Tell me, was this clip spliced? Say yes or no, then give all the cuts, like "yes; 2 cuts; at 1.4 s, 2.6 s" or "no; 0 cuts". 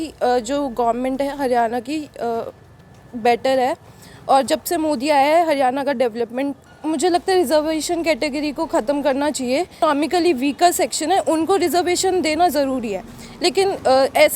yes; 2 cuts; at 6.6 s, 9.8 s